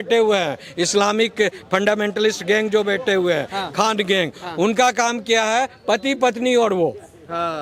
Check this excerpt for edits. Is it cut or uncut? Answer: uncut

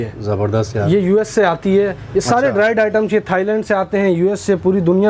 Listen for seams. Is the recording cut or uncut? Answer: uncut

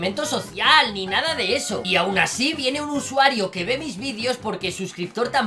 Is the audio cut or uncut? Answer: uncut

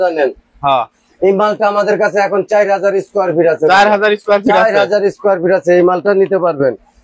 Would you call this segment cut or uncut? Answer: uncut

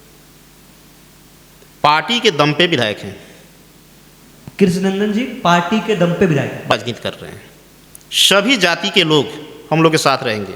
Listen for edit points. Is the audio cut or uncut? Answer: uncut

